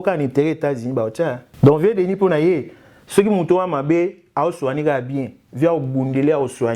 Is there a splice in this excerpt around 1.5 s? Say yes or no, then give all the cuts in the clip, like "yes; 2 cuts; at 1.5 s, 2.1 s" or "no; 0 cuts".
yes; 1 cut; at 1.5 s